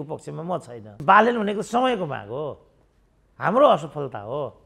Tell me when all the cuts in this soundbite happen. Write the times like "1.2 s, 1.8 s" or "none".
1.0 s